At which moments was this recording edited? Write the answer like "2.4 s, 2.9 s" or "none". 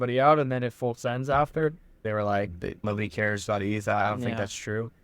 2.0 s, 2.8 s